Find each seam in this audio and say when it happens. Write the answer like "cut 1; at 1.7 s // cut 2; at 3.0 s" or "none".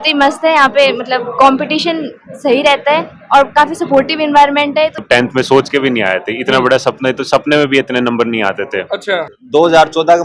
cut 1; at 5.0 s // cut 2; at 9.4 s